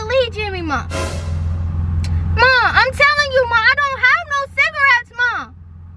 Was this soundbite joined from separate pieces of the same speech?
no; 0 cuts

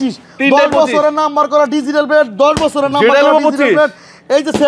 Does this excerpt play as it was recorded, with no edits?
yes; 0 cuts

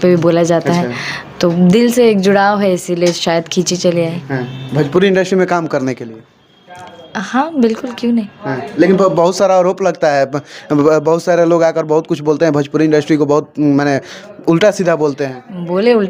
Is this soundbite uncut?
yes; 0 cuts

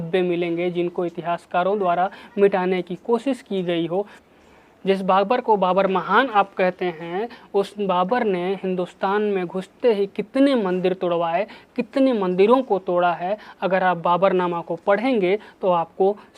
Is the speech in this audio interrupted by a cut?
yes; 1 cut; at 4.2 s

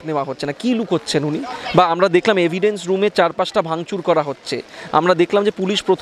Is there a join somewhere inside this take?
no; 0 cuts

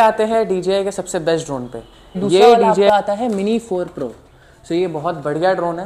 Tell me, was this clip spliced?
yes; 1 cut; at 2.7 s

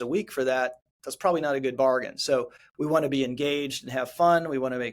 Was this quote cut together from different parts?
yes; 1 cut; at 2.6 s

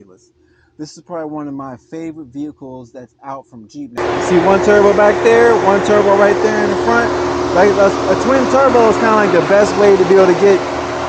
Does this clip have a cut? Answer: yes; 1 cut; at 4.0 s

